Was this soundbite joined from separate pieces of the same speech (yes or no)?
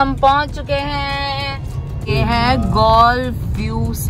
no